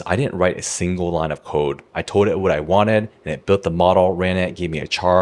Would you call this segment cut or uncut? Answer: uncut